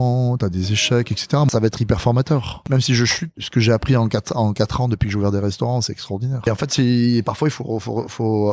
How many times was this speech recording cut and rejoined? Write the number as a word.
four